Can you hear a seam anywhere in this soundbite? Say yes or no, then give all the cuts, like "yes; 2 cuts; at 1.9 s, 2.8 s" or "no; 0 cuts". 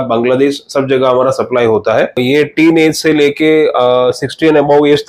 yes; 1 cut; at 2.2 s